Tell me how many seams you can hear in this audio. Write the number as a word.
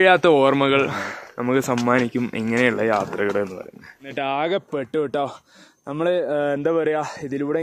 one